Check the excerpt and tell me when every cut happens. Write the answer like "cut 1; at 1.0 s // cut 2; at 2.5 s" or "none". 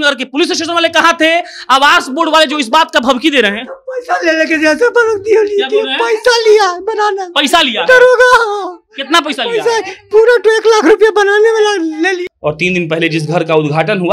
cut 1; at 12.3 s